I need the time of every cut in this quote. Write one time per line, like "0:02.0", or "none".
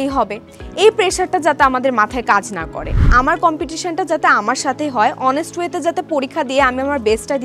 0:03.1